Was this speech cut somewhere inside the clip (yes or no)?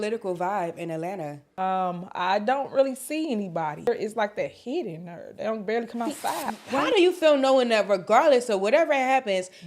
yes